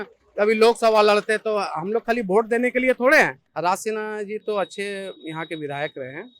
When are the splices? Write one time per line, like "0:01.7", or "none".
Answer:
0:03.4